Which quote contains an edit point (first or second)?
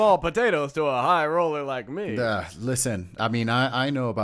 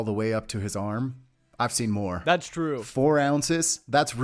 second